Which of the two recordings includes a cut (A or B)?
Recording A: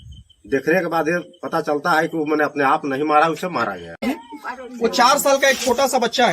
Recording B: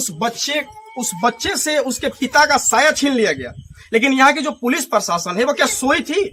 A